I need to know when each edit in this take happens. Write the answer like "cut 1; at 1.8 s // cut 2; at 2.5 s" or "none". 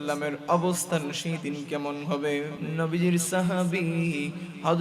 cut 1; at 2.6 s

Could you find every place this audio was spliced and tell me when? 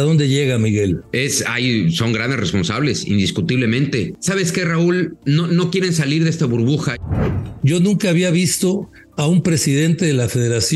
cut 1; at 1.1 s // cut 2; at 4.1 s // cut 3; at 5.2 s // cut 4; at 7.0 s

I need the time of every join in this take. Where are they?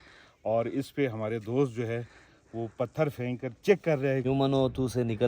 cut 1; at 4.2 s

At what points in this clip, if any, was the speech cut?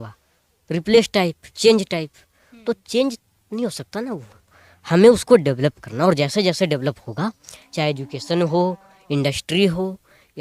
none

